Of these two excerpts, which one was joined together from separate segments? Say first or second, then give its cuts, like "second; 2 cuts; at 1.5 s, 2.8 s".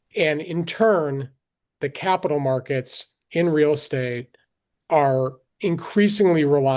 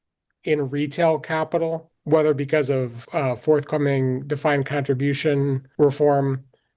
second; 3 cuts; at 1.9 s, 3.0 s, 5.6 s